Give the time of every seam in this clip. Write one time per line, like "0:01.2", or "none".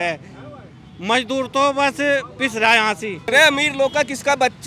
0:03.2